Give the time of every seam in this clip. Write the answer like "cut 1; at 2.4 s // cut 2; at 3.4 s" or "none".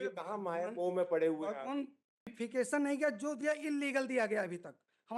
cut 1; at 2.4 s